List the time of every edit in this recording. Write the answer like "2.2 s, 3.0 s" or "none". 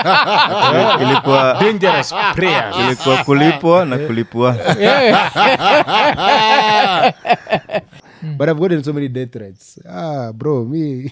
8.0 s